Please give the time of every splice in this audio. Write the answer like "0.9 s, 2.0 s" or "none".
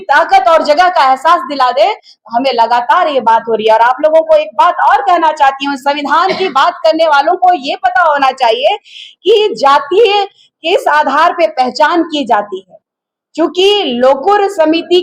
none